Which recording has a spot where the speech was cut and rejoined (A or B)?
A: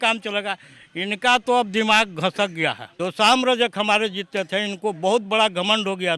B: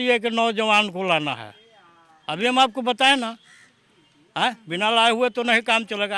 A